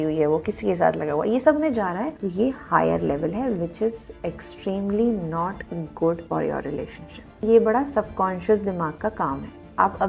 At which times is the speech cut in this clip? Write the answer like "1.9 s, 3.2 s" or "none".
2.2 s, 6.2 s, 7.4 s